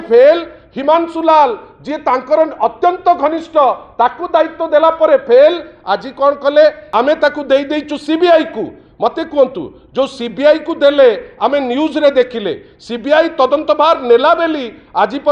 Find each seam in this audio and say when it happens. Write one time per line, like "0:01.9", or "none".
0:06.8